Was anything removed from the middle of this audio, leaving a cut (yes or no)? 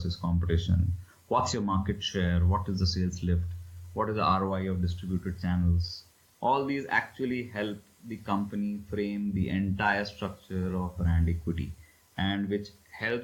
no